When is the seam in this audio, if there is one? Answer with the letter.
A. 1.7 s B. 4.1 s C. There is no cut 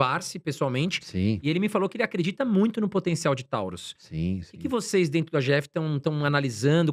C